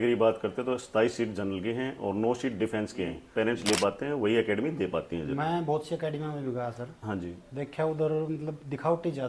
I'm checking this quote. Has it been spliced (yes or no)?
yes